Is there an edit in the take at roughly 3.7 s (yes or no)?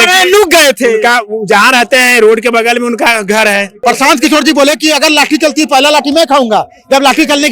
yes